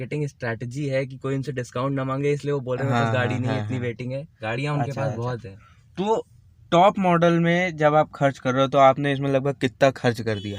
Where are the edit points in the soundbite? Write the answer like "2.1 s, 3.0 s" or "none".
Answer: none